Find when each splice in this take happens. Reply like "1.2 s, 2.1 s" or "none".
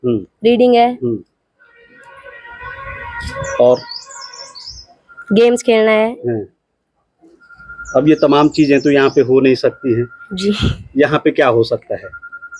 none